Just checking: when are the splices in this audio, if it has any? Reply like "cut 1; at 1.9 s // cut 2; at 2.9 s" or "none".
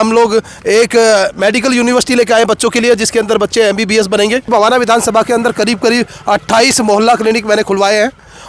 cut 1; at 4.5 s